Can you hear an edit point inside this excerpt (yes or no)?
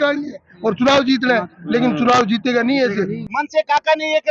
yes